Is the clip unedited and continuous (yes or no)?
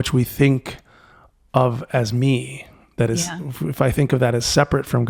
yes